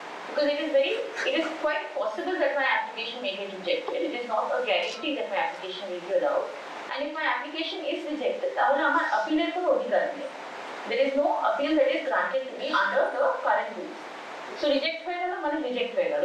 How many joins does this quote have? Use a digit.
0